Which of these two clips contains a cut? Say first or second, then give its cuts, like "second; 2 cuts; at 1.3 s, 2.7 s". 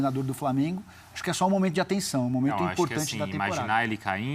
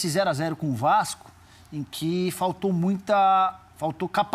second; 1 cut; at 1.9 s